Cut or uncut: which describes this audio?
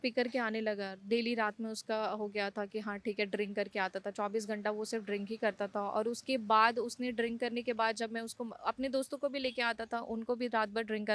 uncut